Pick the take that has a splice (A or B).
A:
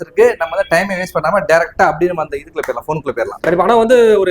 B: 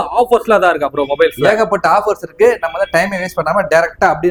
A